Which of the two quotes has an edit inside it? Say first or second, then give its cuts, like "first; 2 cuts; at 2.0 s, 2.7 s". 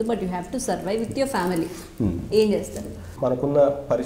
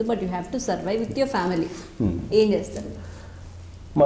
first; 1 cut; at 3.1 s